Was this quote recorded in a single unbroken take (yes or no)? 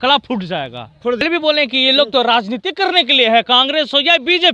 no